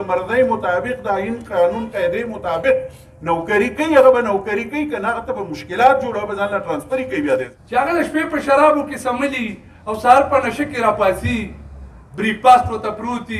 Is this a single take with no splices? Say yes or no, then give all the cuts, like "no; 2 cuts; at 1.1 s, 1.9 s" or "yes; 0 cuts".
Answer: no; 1 cut; at 7.6 s